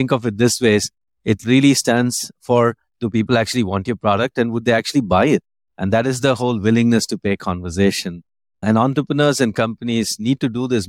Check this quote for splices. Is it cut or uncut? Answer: uncut